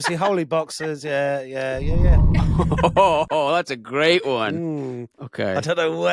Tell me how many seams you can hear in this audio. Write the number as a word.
one